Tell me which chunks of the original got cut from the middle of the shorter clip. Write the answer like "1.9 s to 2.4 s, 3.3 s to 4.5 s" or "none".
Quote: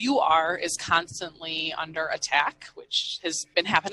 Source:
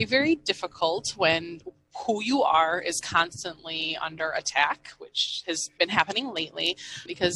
none